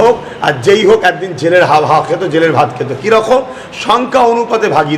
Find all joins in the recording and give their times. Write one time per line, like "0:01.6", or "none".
none